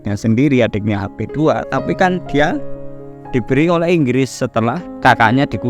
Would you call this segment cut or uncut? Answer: uncut